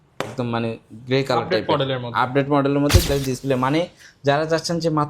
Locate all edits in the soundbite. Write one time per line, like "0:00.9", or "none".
0:03.1